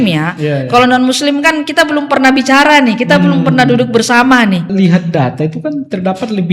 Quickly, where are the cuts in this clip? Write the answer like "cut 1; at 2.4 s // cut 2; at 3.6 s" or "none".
cut 1; at 4.7 s